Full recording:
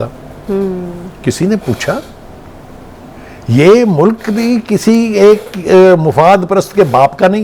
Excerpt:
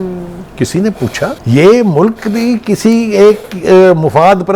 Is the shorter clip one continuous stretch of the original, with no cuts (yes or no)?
no